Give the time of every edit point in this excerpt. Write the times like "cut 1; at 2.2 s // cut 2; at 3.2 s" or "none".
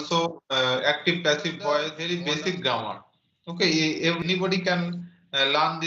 cut 1; at 2.0 s // cut 2; at 4.2 s